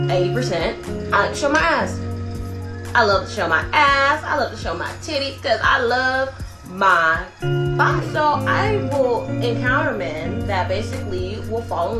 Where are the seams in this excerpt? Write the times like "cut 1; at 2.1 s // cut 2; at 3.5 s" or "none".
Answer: cut 1; at 3.1 s